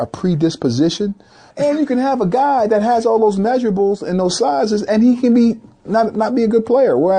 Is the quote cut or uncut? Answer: cut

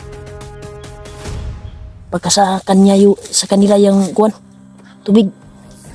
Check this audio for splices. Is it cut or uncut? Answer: cut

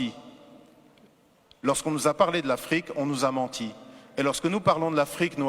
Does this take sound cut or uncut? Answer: cut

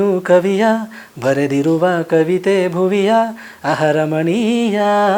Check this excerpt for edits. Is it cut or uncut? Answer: uncut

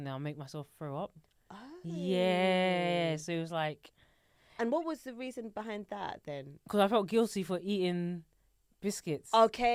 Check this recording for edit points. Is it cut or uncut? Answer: uncut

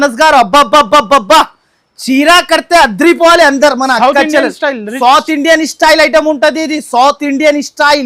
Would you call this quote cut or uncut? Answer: uncut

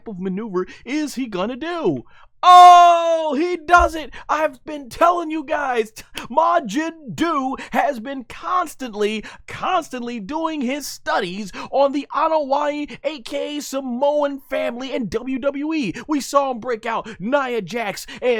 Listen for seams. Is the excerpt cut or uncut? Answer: uncut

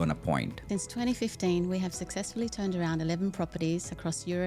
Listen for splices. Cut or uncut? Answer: cut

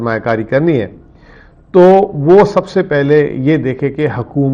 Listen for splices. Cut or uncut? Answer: uncut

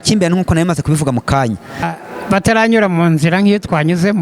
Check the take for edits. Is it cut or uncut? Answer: cut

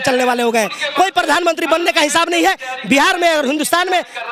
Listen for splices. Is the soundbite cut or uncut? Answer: uncut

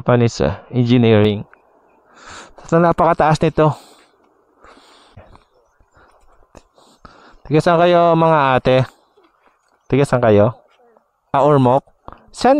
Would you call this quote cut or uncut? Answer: cut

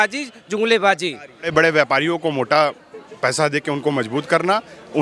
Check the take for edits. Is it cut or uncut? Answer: cut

